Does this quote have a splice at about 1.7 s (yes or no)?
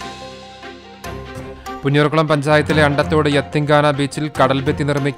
yes